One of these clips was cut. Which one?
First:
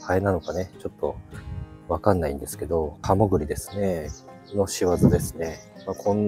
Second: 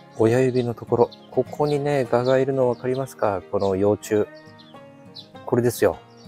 first; 1 cut; at 3.0 s

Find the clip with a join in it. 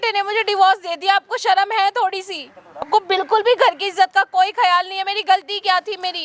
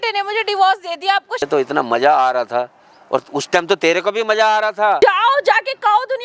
second; 2 cuts; at 1.4 s, 5.0 s

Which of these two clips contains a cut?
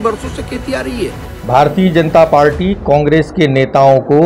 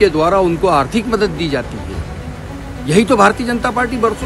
first; 1 cut; at 1.3 s

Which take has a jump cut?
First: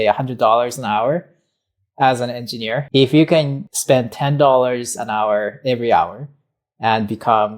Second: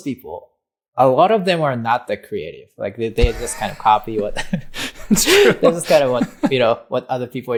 first; 2 cuts; at 2.9 s, 3.6 s

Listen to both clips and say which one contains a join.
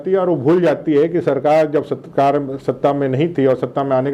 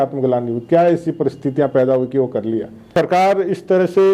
second; 1 cut; at 2.9 s

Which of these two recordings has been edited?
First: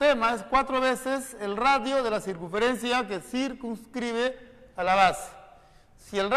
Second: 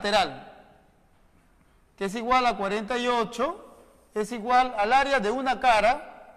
second; 1 cut; at 5.0 s

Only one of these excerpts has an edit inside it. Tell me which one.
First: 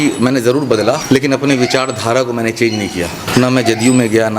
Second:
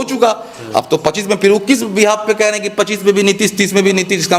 first; 2 cuts; at 1.0 s, 3.3 s

